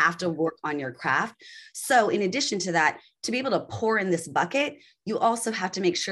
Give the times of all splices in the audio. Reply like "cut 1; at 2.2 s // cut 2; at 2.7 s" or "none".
none